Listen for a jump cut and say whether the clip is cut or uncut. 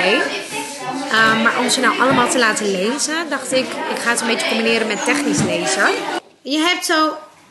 cut